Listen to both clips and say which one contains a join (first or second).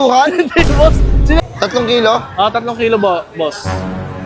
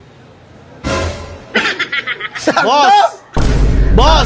first